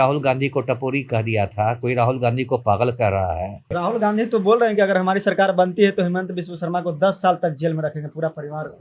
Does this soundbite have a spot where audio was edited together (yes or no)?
yes